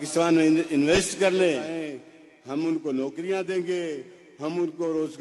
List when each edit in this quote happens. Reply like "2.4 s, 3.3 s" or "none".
1.7 s